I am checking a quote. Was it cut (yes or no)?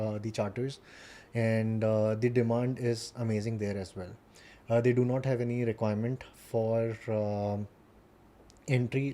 no